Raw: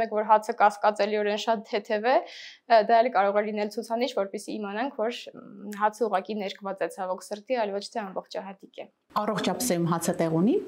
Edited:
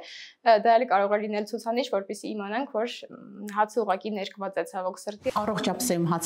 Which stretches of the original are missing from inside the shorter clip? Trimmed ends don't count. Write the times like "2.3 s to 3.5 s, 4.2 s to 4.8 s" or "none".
7.6 s to 9.1 s